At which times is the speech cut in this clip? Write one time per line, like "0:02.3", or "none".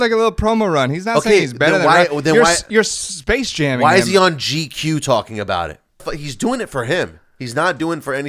0:06.2